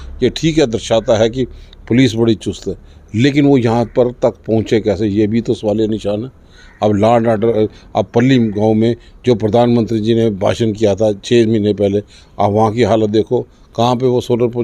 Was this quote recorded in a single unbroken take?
yes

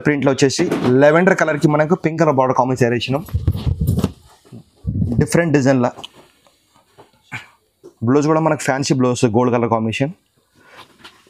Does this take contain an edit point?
no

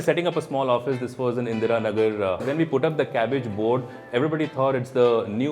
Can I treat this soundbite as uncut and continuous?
no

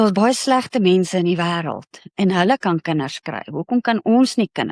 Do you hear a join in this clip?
no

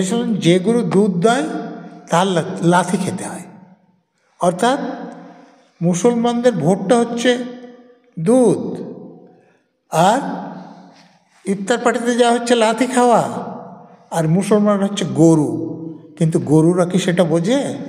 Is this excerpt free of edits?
yes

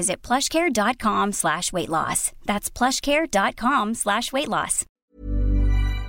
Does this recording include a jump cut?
yes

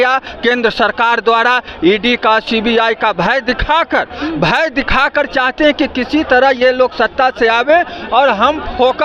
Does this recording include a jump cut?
no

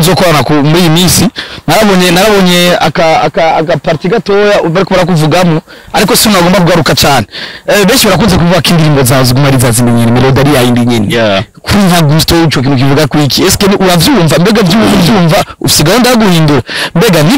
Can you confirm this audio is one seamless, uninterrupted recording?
yes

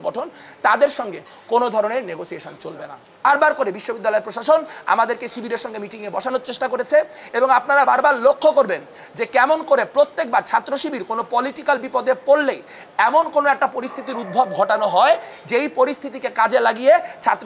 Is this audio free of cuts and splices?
no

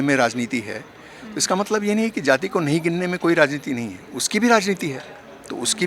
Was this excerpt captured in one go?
yes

